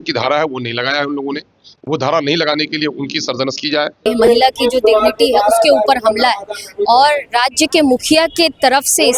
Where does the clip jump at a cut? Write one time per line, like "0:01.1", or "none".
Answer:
0:04.1

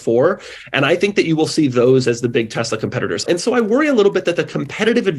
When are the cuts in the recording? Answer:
0:03.2

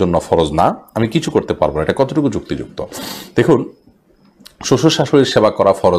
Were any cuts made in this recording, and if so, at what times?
none

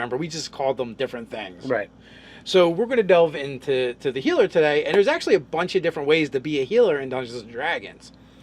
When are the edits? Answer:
0:05.2

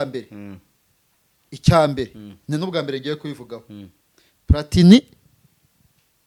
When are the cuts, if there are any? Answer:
none

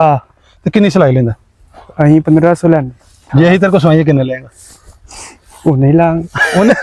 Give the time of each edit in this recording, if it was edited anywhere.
0:03.2

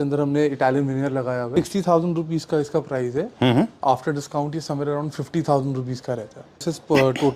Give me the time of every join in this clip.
0:01.5
0:06.6

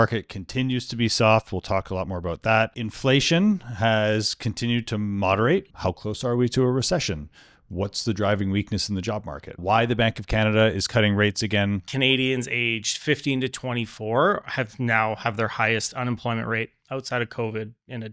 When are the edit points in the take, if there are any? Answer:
0:05.7
0:09.6
0:11.9

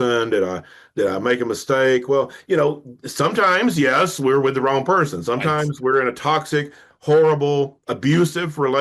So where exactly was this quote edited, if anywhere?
none

